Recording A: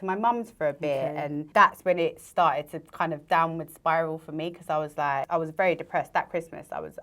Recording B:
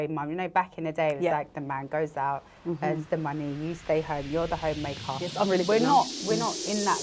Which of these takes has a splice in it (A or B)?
A